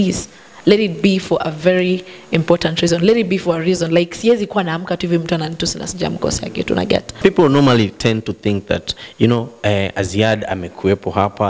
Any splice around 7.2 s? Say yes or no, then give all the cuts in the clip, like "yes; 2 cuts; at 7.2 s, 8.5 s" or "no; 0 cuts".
yes; 1 cut; at 7.2 s